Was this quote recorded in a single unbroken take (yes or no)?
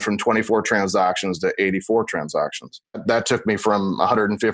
no